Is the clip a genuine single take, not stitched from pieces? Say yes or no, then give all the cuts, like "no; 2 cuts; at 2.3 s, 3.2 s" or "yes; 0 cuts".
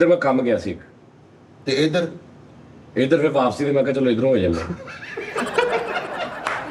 yes; 0 cuts